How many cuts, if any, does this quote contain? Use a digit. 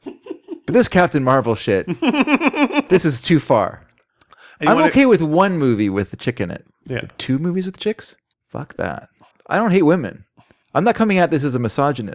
2